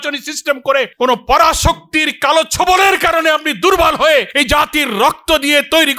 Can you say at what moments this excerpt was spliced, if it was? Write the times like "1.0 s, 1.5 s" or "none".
0.9 s, 4.3 s